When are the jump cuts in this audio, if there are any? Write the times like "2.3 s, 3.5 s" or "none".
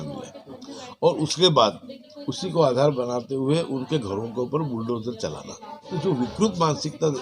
5.9 s